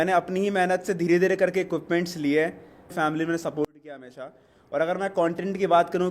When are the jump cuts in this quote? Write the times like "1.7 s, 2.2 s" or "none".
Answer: 2.9 s